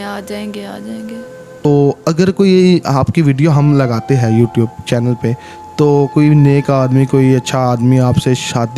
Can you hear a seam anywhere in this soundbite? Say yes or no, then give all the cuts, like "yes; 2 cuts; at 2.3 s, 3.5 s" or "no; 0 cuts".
yes; 1 cut; at 1.7 s